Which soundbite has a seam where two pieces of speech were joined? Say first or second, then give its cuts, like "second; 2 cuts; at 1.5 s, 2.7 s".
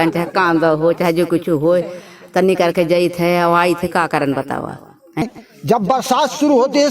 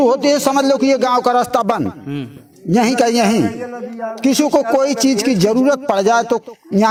first; 1 cut; at 5.2 s